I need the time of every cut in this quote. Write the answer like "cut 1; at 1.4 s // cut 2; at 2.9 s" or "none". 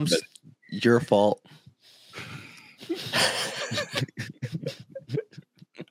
none